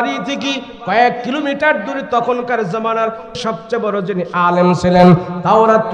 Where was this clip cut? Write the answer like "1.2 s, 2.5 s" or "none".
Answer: 3.4 s